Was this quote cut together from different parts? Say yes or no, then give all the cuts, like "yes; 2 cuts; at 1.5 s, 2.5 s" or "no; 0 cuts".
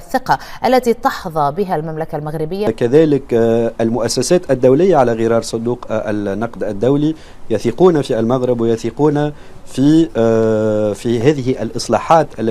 yes; 1 cut; at 2.7 s